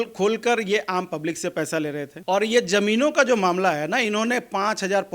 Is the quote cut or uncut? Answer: cut